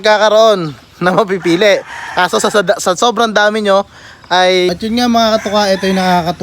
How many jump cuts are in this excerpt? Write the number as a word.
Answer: one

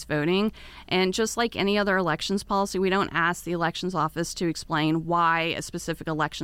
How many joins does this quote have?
zero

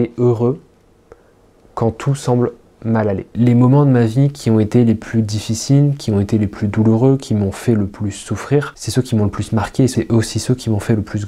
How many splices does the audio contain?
three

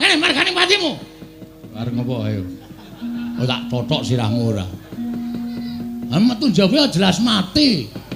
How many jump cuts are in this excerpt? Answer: one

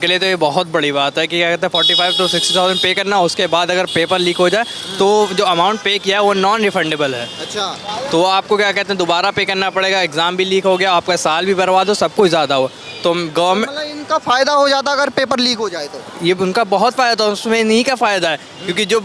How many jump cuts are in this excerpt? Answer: zero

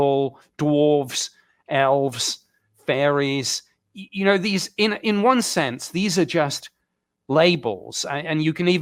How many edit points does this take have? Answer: zero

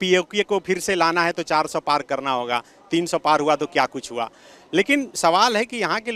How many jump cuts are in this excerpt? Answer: zero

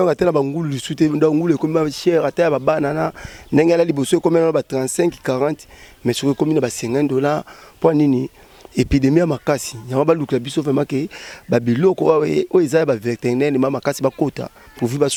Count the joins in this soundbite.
zero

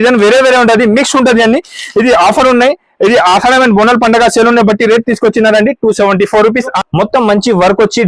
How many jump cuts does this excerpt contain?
one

